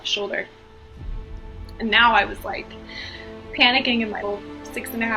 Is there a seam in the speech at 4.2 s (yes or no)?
yes